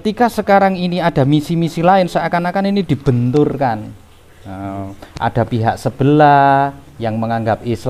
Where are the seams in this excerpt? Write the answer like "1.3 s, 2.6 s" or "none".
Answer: none